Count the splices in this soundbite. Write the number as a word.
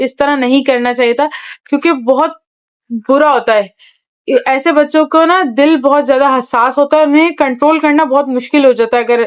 zero